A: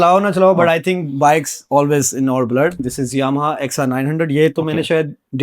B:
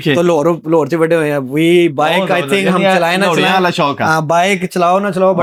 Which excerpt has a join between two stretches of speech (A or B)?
A